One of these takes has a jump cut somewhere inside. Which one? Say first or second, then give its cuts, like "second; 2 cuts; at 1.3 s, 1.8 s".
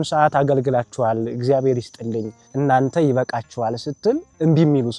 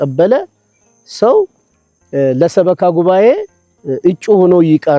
first; 1 cut; at 2.4 s